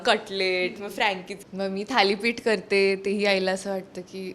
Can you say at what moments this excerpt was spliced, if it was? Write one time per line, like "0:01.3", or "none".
0:01.4